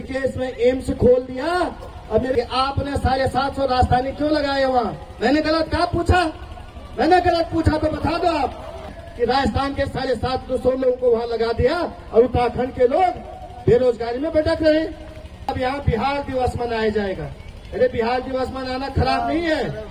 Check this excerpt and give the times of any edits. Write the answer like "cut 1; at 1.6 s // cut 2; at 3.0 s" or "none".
cut 1; at 2.3 s // cut 2; at 9.0 s // cut 3; at 15.5 s